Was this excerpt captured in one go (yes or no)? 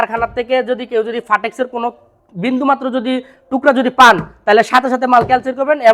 yes